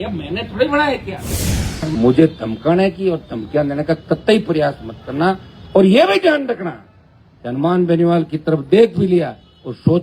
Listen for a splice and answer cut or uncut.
cut